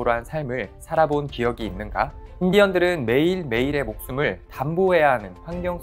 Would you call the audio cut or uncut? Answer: cut